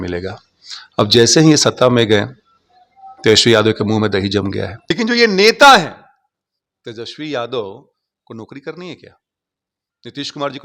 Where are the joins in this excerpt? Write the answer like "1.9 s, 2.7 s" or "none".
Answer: 4.9 s